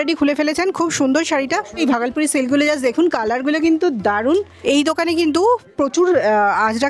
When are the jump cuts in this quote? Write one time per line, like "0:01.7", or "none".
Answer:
0:01.8
0:04.5